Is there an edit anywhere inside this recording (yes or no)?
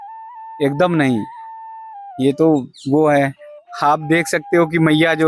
no